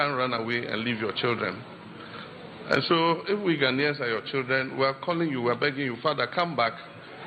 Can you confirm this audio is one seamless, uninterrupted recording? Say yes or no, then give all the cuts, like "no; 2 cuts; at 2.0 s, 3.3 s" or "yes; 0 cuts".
yes; 0 cuts